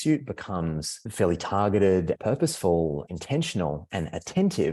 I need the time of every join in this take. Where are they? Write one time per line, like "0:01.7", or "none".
0:01.0
0:02.2
0:03.1